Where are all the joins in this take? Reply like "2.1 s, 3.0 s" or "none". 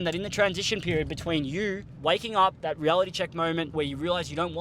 1.9 s, 2.6 s, 3.7 s